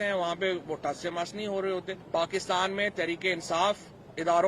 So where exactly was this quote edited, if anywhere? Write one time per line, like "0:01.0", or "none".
0:02.0